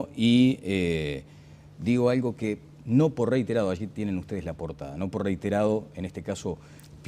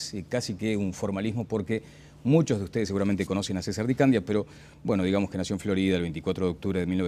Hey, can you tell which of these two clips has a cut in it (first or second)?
first